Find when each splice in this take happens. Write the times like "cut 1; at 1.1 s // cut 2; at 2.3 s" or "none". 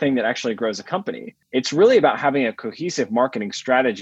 cut 1; at 1.3 s

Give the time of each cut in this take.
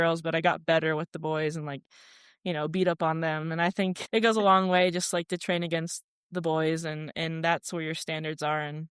none

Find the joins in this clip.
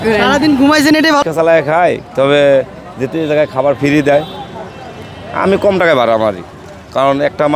cut 1; at 1.2 s

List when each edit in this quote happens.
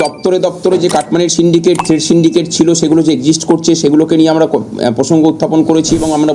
none

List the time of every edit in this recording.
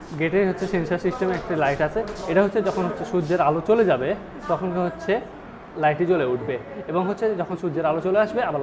none

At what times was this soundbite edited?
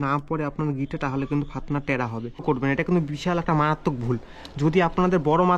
cut 1; at 2.4 s

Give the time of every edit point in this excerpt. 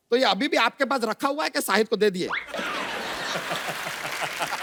none

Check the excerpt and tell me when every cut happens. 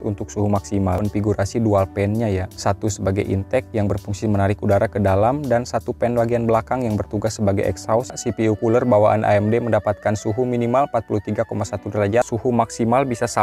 cut 1; at 1.0 s // cut 2; at 8.2 s // cut 3; at 12.3 s

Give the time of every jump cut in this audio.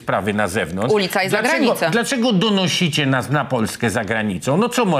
none

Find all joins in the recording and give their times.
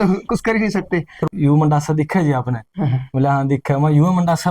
cut 1; at 1.2 s

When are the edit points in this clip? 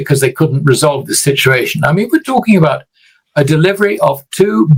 none

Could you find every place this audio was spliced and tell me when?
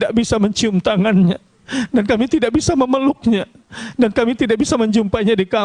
none

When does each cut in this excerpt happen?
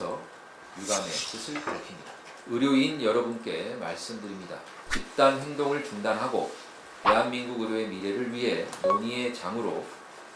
cut 1; at 2.3 s // cut 2; at 4.8 s

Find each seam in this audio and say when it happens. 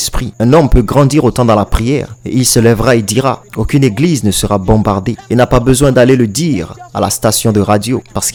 none

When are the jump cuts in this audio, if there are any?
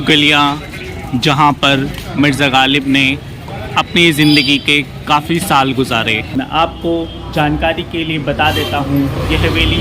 cut 1; at 6.3 s

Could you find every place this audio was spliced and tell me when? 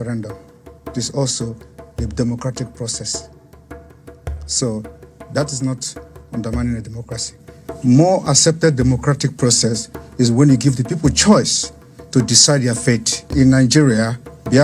cut 1; at 13.3 s

